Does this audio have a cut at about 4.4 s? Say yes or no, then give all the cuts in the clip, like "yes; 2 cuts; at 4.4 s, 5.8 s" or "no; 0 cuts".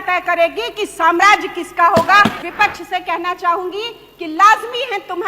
no; 1 cut; at 2.4 s